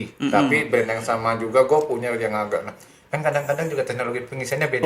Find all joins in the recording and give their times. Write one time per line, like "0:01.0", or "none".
none